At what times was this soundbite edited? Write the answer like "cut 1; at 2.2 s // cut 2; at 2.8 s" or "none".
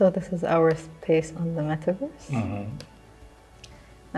none